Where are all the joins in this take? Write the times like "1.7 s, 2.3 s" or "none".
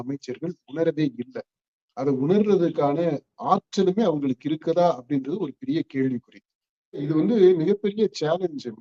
7.0 s